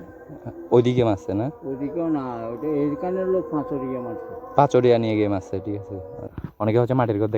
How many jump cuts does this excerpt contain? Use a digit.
1